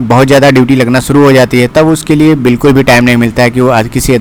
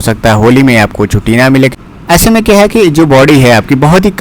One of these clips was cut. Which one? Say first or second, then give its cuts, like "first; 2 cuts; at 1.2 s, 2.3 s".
second; 1 cut; at 1.8 s